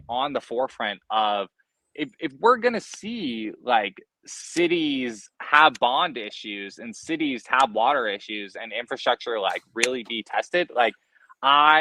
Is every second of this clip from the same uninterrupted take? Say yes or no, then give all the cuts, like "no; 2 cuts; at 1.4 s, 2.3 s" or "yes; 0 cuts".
yes; 0 cuts